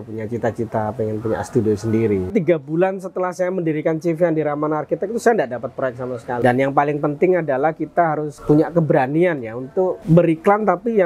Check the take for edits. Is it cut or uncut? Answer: cut